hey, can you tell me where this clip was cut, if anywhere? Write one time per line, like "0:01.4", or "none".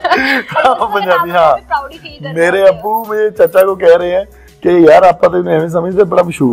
none